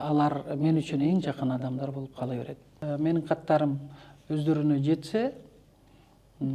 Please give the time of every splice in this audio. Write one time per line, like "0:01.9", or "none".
0:02.8

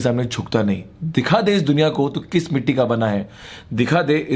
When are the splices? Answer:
none

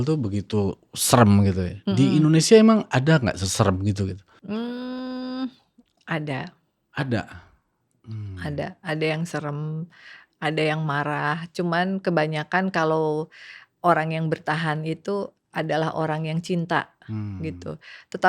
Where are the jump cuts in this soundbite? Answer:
none

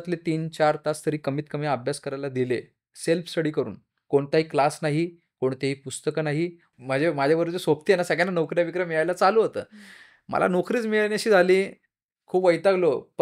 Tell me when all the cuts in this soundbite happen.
0:06.6

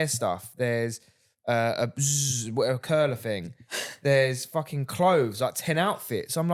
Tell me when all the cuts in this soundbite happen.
none

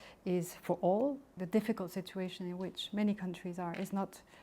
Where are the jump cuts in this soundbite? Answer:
0:01.3

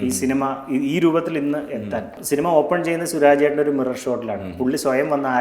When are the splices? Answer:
0:02.2

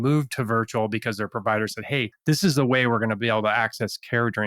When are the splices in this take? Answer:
none

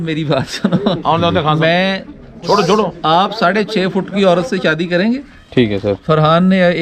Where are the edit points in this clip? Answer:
0:05.3

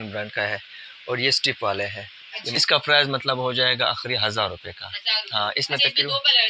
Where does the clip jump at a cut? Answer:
0:02.6

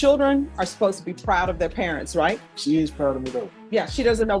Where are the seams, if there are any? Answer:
0:02.5
0:03.5

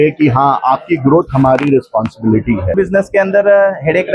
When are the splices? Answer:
0:02.7

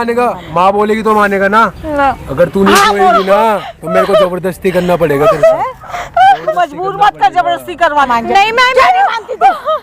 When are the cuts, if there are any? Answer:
0:01.8
0:08.1

